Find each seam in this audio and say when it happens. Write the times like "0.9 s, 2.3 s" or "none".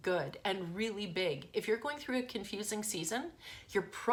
none